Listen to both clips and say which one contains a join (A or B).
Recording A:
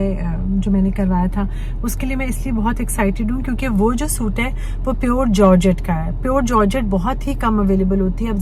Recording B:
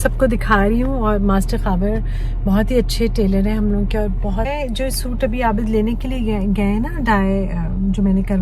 B